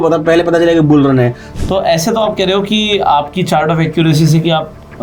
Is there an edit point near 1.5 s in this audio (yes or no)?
yes